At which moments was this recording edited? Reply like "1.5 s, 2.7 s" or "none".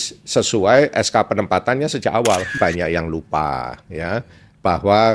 2.6 s